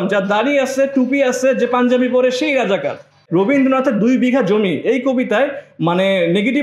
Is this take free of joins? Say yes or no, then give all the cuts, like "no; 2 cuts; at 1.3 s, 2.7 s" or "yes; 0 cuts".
no; 1 cut; at 3.2 s